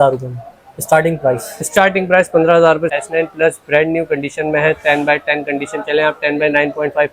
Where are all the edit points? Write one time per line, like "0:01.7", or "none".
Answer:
0:03.0